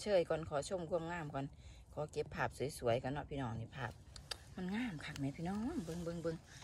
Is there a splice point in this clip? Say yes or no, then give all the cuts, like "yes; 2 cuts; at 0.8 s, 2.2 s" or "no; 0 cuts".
no; 0 cuts